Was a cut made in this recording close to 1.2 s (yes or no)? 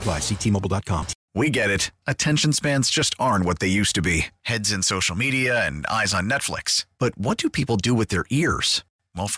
yes